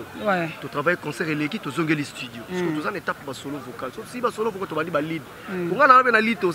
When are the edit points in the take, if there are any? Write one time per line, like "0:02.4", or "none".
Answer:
none